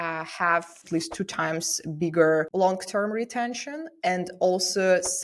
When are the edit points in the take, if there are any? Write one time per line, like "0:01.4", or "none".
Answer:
0:00.8
0:02.5